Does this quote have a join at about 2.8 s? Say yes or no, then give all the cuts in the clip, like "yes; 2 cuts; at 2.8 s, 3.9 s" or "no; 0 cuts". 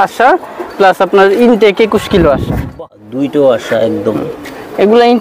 yes; 1 cut; at 2.8 s